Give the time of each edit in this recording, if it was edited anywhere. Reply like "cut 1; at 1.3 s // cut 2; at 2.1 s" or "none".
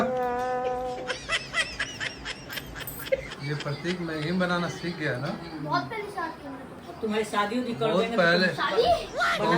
cut 1; at 3.3 s // cut 2; at 6.8 s